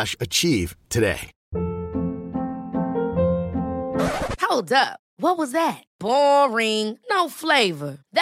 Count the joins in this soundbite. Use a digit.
1